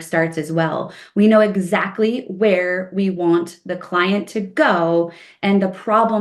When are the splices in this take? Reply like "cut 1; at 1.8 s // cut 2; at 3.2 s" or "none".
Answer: none